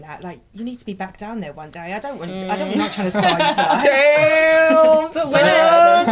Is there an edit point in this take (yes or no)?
no